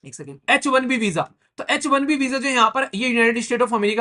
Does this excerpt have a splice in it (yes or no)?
no